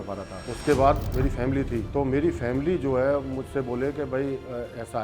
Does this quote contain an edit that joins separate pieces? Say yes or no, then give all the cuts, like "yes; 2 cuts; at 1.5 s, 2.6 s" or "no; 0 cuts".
yes; 1 cut; at 1.2 s